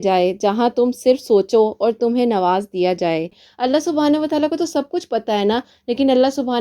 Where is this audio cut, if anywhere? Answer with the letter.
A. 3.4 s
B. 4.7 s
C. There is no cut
A